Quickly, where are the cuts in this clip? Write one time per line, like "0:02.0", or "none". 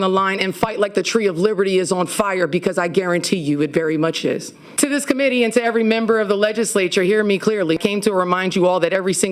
none